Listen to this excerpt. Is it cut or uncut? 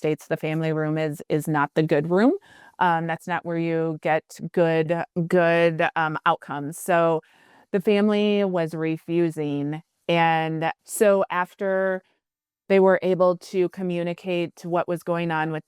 uncut